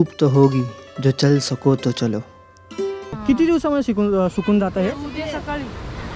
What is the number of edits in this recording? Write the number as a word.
one